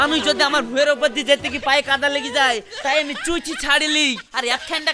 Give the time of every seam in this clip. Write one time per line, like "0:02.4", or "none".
none